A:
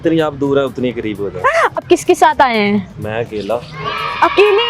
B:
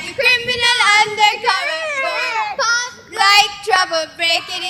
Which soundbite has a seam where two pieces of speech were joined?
A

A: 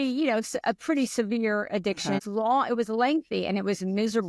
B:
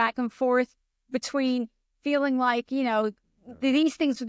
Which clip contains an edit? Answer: A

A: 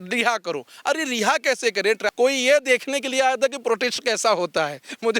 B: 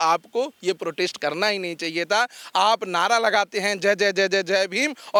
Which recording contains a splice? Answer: A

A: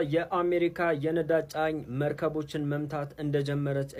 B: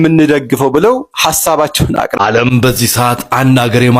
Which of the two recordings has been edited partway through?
B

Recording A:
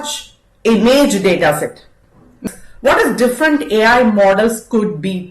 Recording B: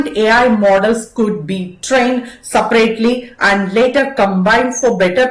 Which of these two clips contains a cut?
A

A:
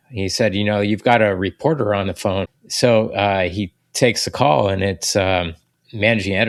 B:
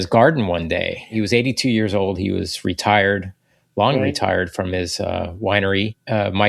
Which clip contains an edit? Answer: B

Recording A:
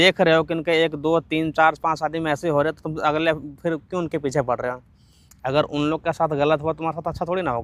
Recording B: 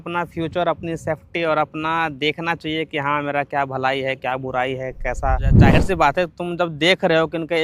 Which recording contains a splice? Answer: B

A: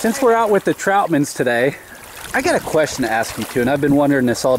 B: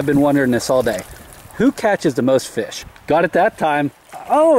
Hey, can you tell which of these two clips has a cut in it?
B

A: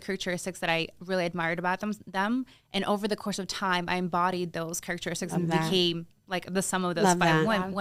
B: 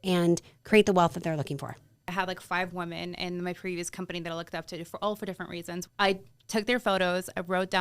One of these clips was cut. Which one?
B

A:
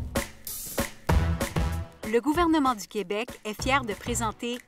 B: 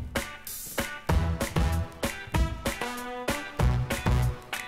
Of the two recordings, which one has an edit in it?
A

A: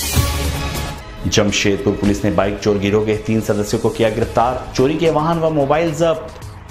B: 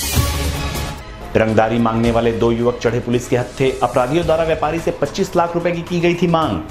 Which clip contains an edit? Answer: A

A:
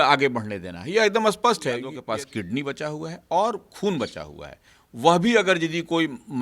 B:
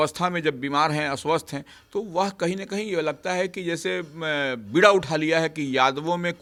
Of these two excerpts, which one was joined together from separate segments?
A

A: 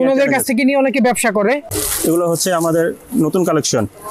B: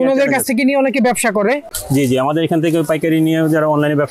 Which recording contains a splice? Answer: A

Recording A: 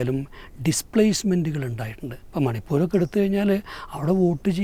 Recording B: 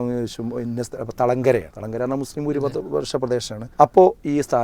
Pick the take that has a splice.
B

